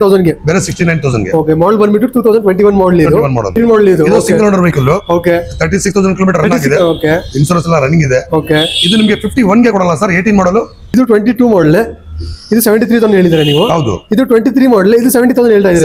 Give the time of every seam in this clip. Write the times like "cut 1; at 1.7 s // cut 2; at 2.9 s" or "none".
cut 1; at 3.6 s // cut 2; at 10.9 s